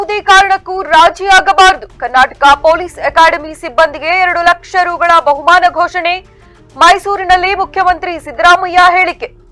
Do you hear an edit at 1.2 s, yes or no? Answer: no